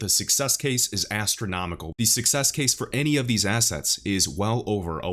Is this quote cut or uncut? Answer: cut